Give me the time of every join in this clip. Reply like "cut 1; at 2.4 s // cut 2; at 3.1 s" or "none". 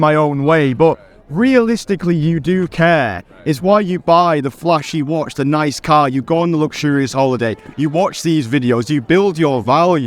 none

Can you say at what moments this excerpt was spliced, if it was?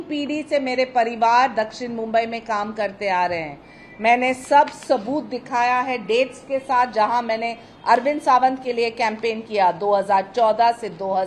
none

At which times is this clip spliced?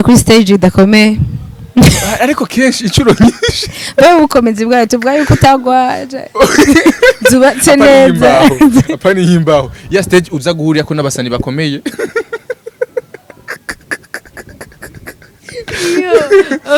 none

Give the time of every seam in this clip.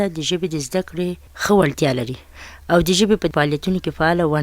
cut 1; at 3.3 s

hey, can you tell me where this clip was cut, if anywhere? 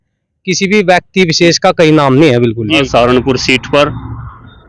cut 1; at 2.9 s

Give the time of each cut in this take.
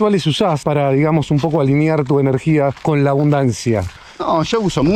none

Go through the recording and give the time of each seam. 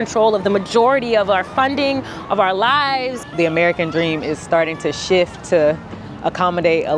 cut 1; at 3.1 s

